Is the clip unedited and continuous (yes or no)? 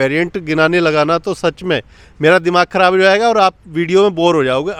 yes